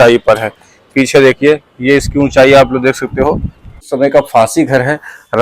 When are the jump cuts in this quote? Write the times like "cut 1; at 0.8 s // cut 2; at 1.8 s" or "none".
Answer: cut 1; at 3.9 s